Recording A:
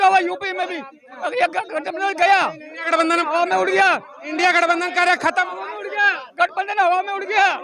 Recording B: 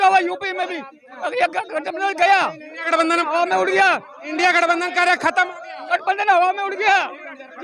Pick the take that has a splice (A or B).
B